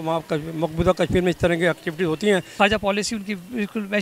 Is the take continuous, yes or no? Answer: no